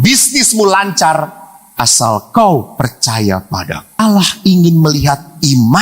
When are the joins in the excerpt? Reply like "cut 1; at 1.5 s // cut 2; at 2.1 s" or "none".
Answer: cut 1; at 3.9 s